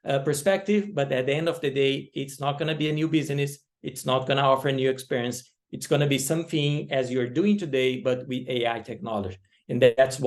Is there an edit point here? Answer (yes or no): no